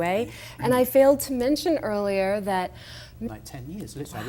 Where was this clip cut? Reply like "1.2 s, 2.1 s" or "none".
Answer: none